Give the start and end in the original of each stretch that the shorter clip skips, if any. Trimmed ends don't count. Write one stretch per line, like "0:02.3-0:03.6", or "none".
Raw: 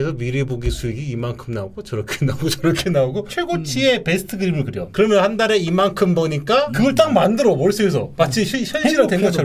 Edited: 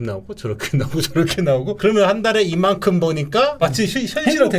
0:03.2-0:04.9
0:06.7-0:08.1